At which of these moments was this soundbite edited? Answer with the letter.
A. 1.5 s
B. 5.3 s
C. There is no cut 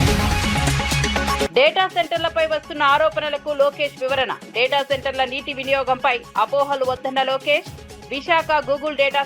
A